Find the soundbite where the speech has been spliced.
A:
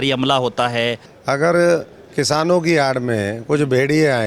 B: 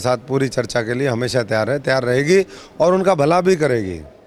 A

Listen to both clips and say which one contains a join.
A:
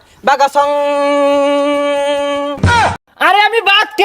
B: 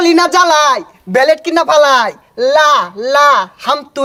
A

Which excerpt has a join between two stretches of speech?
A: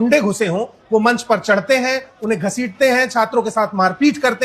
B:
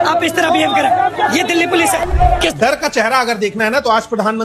B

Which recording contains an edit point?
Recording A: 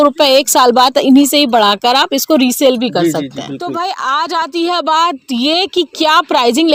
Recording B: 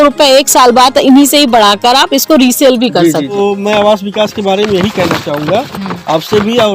B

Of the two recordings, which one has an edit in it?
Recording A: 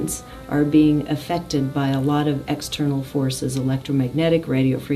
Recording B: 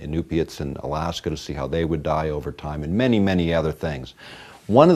A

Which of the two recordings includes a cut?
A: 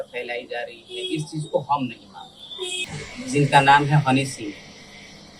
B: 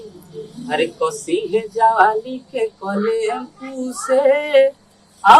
A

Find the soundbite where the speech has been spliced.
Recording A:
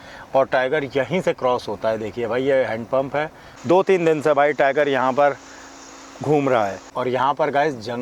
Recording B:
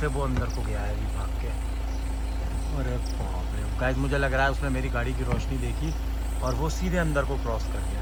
A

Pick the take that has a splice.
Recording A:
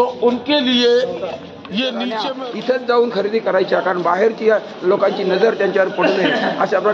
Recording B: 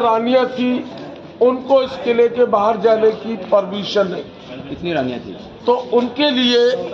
A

